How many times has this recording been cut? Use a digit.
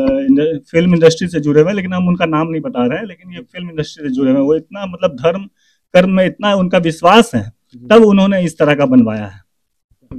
0